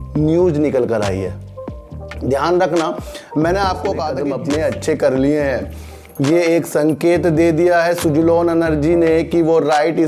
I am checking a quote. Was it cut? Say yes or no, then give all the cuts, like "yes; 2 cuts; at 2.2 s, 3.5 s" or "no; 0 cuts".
yes; 1 cut; at 4.2 s